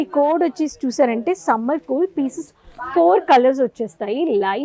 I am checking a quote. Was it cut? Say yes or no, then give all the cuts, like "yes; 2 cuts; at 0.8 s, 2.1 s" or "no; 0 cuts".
no; 0 cuts